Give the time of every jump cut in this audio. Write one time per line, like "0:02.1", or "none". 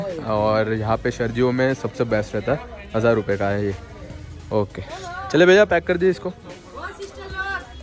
none